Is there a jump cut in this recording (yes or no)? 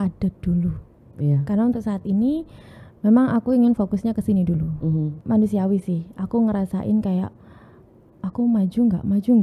yes